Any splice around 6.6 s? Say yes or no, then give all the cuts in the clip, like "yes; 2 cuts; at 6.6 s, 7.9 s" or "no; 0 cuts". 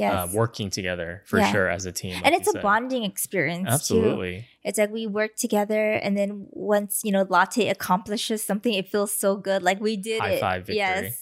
no; 0 cuts